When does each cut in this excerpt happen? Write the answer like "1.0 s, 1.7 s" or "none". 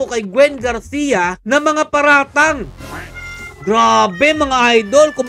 2.8 s